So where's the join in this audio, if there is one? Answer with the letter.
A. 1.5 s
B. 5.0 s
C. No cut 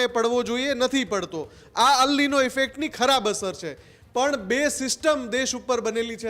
C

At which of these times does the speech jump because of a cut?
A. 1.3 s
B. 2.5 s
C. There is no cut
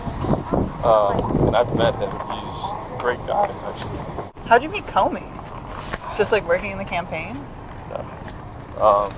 C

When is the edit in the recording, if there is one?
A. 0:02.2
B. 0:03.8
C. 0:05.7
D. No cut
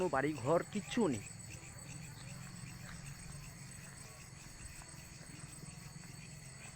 D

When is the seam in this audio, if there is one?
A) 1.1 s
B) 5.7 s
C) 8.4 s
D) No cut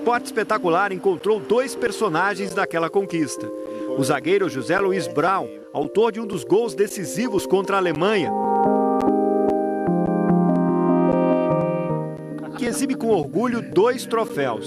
C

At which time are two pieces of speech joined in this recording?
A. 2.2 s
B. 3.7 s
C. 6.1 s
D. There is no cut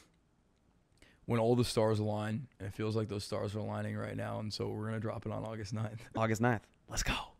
C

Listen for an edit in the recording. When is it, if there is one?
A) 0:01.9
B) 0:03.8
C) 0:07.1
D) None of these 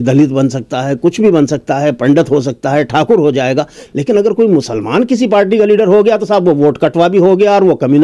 D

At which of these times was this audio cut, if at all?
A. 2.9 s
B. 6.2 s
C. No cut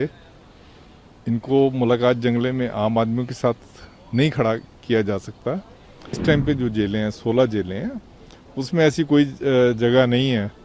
B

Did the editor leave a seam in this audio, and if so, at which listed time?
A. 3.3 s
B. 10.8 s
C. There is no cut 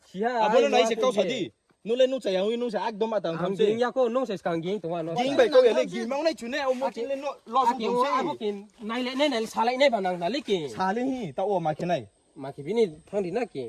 C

